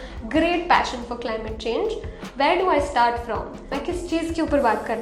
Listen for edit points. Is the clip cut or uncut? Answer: cut